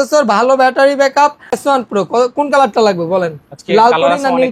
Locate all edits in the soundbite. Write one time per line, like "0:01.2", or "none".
0:01.6